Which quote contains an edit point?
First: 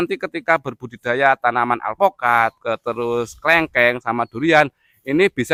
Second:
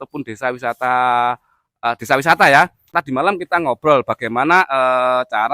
second; 1 cut; at 3.0 s

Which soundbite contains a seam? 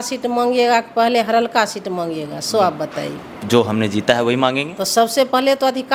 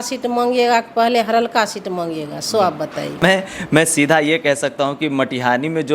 second; 1 cut; at 3.2 s

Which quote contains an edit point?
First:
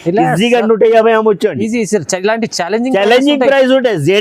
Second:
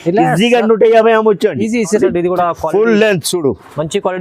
second; 1 cut; at 2.0 s

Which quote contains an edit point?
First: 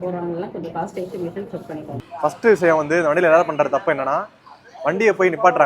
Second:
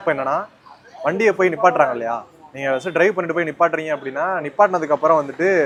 first; 1 cut; at 2.0 s

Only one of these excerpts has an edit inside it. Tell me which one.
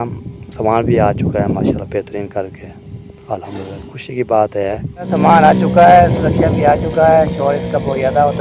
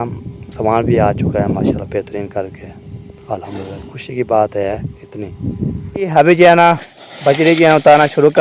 first; 1 cut; at 4.9 s

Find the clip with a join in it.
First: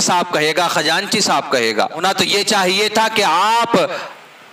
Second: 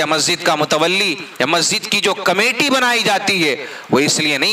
first; 1 cut; at 2.0 s

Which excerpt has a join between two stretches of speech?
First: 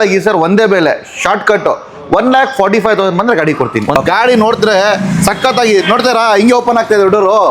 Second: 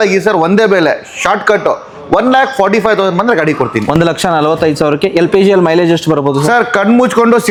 first; 1 cut; at 3.9 s

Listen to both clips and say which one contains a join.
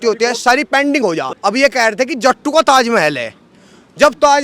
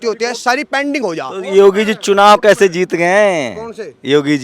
first; 1 cut; at 1.3 s

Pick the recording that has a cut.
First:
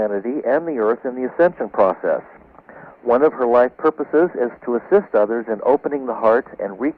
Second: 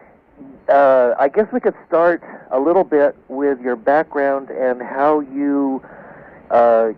second; 1 cut; at 1.0 s

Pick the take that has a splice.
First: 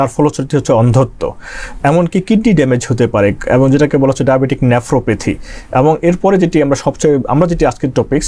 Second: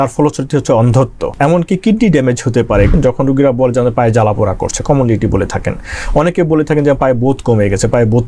second; 2 cuts; at 1.2 s, 2.9 s

